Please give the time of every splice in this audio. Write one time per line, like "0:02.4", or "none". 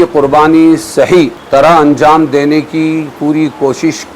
0:01.4